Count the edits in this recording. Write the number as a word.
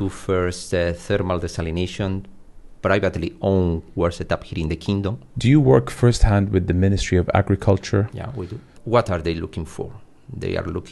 two